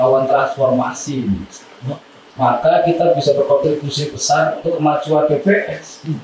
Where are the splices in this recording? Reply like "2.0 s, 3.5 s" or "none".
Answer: none